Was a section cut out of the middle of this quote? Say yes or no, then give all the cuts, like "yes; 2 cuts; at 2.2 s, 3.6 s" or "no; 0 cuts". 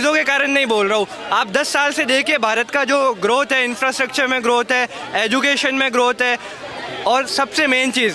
no; 0 cuts